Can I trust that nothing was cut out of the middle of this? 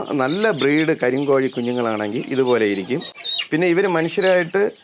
yes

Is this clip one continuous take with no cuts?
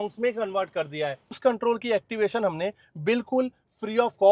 no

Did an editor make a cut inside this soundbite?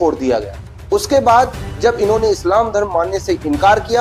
no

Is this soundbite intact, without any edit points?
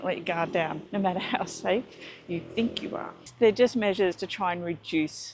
no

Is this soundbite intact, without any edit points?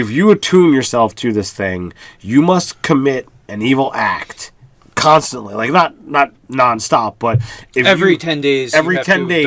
yes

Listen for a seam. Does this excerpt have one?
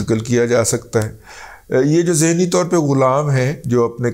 no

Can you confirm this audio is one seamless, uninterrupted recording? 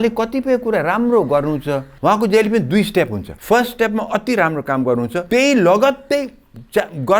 no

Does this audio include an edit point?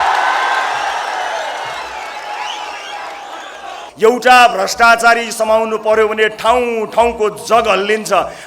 yes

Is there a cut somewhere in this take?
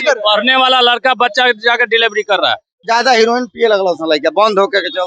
yes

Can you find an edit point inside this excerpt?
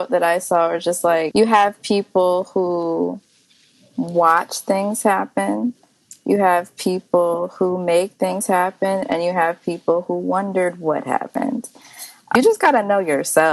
yes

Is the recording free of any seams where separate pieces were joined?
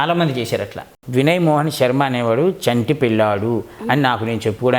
no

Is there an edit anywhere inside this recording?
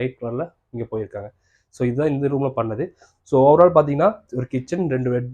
no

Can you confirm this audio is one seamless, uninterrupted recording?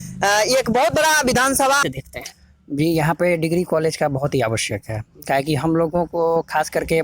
no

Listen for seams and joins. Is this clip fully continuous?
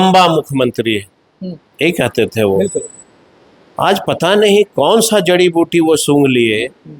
yes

